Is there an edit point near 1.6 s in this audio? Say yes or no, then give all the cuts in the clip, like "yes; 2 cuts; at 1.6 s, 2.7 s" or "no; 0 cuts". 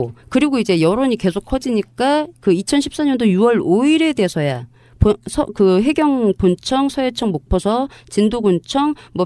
no; 0 cuts